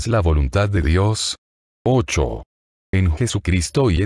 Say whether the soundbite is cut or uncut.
cut